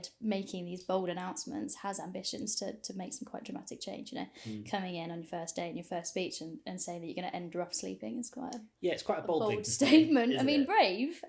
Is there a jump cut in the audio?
no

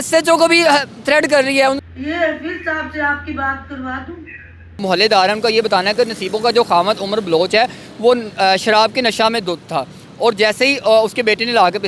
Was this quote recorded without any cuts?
no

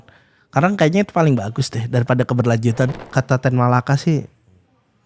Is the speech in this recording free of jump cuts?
no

